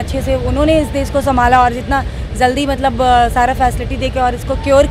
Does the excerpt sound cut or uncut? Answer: uncut